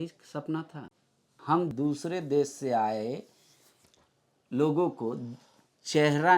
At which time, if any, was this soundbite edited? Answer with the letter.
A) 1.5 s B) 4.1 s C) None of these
A